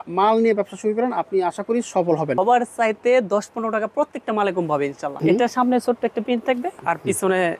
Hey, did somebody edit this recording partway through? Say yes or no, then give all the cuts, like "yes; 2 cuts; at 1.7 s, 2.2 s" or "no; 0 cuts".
yes; 2 cuts; at 2.3 s, 5.1 s